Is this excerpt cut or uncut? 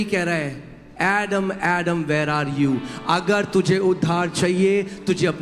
uncut